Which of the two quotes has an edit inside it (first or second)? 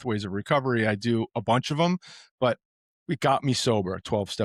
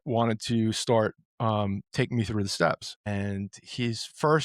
second